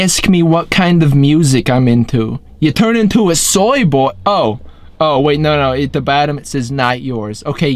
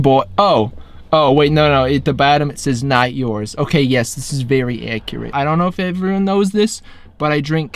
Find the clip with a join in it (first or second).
second